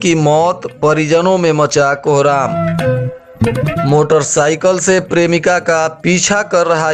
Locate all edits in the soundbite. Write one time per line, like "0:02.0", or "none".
none